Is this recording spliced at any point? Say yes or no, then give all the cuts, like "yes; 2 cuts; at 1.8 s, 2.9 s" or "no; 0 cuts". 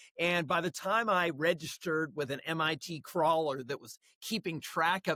no; 0 cuts